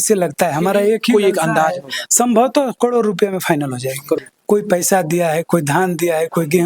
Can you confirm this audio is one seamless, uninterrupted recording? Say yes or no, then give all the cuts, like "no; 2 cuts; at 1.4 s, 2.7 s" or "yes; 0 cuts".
no; 1 cut; at 4.2 s